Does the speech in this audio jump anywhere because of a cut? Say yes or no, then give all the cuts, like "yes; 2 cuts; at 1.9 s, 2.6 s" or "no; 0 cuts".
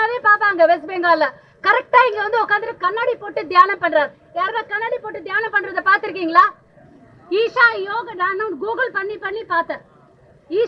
no; 0 cuts